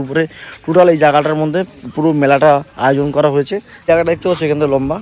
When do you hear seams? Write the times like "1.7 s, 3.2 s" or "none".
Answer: 3.8 s